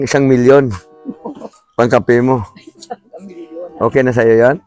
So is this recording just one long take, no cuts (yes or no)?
yes